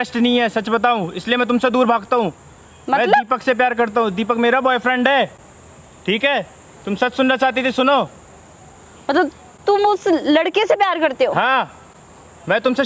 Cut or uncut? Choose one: uncut